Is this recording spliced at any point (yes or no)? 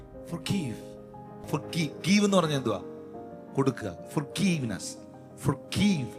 yes